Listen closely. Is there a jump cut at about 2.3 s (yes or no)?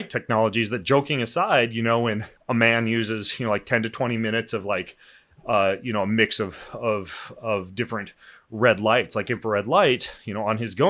yes